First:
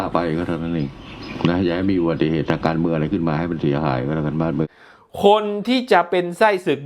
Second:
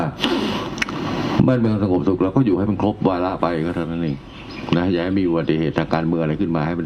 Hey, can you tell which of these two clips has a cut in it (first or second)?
first